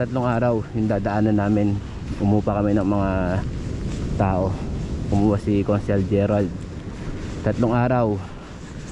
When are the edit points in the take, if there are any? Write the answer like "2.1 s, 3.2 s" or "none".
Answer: none